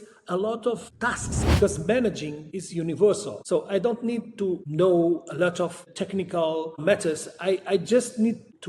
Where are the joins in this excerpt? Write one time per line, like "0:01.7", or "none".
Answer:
0:01.3